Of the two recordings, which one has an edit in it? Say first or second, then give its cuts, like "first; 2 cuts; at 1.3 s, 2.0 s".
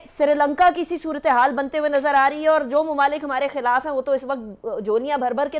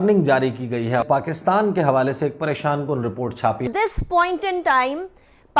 second; 2 cuts; at 1.0 s, 3.7 s